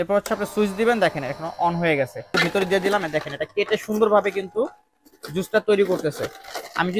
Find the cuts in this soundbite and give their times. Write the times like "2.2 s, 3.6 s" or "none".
2.4 s